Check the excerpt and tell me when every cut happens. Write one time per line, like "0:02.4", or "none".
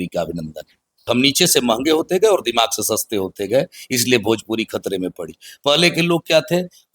0:00.9